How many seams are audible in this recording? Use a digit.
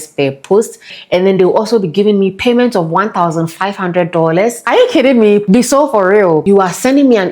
4